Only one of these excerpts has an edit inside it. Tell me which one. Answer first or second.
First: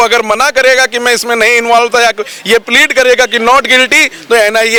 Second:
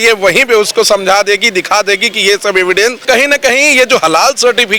second